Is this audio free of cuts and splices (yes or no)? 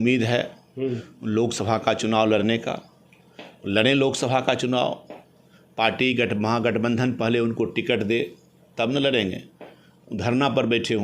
yes